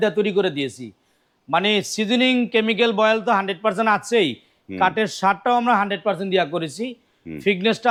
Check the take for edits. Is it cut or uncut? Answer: uncut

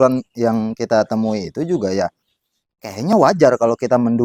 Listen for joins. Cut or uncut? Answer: uncut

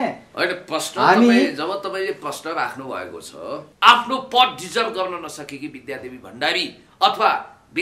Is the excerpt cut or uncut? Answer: cut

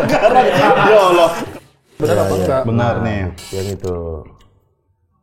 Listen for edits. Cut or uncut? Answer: cut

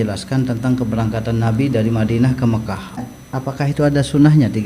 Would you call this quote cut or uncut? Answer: cut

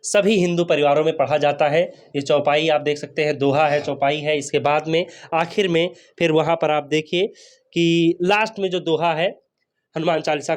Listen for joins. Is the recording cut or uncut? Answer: uncut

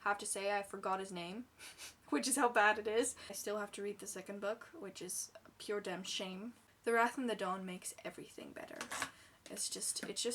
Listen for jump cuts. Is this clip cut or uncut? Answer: cut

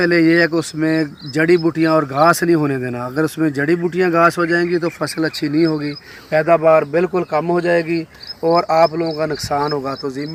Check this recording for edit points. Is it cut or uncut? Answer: uncut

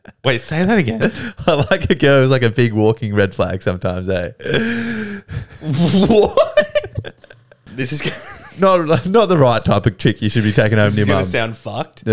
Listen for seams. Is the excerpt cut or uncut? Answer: cut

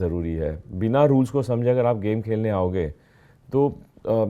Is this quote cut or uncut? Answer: uncut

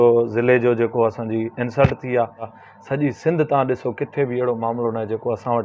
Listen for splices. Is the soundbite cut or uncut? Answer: cut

